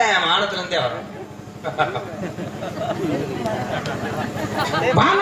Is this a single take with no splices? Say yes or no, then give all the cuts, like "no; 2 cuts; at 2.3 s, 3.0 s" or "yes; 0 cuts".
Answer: yes; 0 cuts